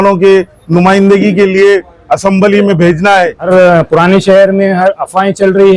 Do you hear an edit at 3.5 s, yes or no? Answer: yes